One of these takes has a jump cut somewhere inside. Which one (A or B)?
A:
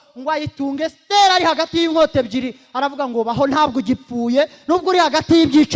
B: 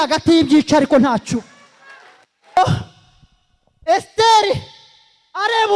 B